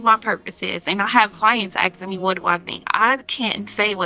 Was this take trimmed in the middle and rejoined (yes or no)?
no